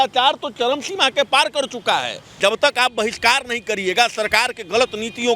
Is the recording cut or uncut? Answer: cut